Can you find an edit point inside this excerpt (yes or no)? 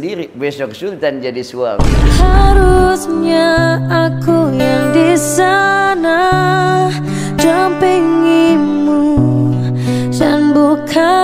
no